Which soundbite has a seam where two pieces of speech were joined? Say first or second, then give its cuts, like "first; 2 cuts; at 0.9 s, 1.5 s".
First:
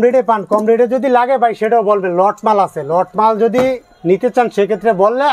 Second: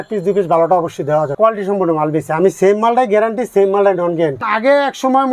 second; 2 cuts; at 1.3 s, 4.5 s